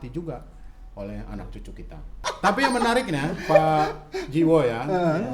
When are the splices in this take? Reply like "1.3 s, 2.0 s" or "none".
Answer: 2.3 s